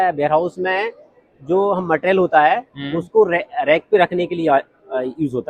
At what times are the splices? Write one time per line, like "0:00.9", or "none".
none